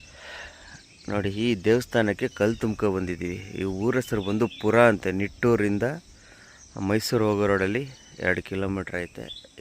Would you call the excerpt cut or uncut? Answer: uncut